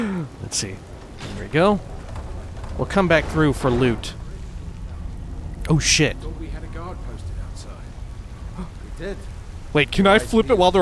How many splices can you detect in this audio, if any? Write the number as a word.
zero